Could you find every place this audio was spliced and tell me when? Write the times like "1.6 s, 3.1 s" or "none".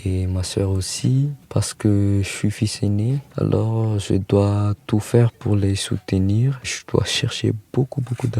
1.4 s, 3.3 s, 5.3 s